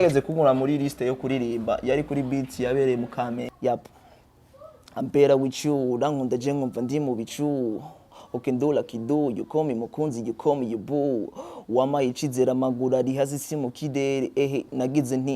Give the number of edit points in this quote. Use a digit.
1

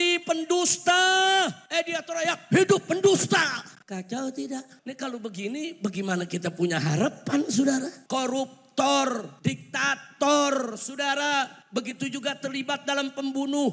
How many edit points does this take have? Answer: 6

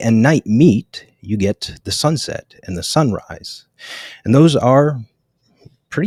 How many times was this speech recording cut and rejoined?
0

